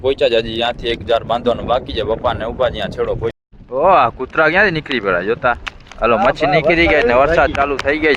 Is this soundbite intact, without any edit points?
no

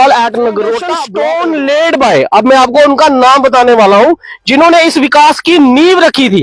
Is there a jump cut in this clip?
yes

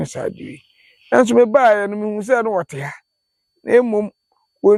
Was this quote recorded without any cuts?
yes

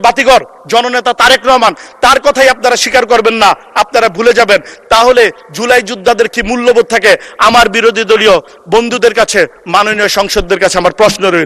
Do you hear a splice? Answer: no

